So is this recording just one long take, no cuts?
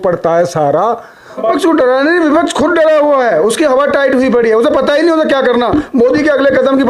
no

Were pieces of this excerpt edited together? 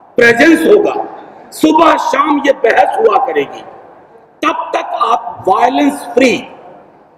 no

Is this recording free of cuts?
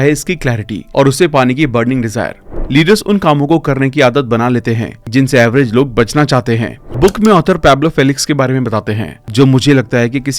no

